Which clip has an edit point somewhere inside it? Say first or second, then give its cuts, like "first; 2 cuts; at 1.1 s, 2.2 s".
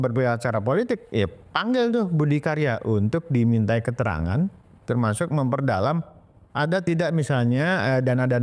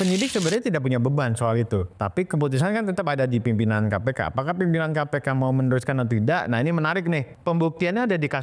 second; 2 cuts; at 1.9 s, 7.3 s